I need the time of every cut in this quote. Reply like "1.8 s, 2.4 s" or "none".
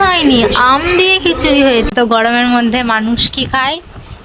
1.9 s